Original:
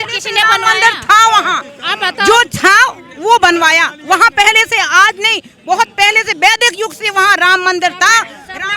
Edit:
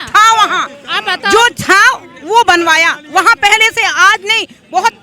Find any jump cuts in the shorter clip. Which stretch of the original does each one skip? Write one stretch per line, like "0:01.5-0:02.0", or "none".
none